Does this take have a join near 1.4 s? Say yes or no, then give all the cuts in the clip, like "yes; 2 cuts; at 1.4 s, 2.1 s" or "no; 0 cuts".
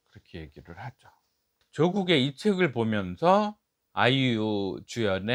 no; 0 cuts